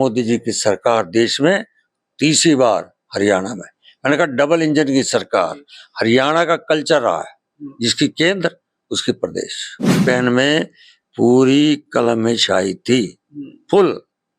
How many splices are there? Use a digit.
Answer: 1